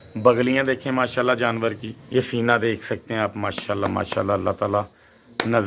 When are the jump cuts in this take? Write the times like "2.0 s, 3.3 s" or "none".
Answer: 1.9 s

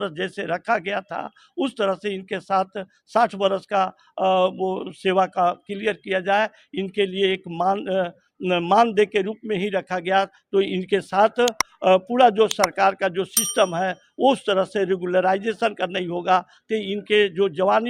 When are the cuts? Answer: none

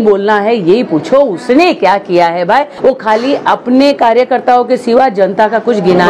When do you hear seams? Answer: 2.7 s

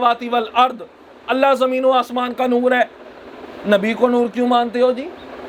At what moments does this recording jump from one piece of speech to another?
none

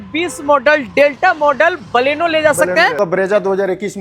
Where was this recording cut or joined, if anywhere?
2.9 s

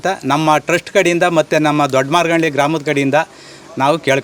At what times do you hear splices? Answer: none

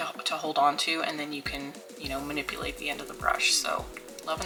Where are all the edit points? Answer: none

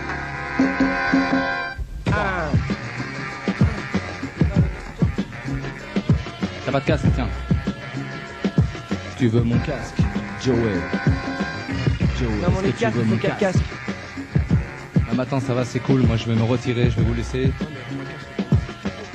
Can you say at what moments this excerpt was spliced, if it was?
15.0 s

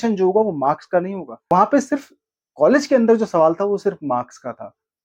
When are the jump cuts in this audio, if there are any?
1.5 s

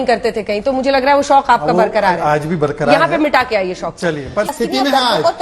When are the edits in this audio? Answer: 4.5 s

